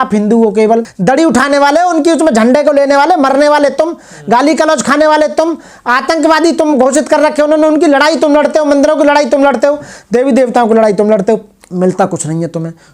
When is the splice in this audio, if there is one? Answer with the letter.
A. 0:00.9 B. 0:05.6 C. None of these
A